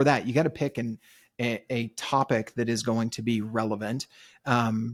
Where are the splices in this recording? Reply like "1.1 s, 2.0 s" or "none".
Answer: none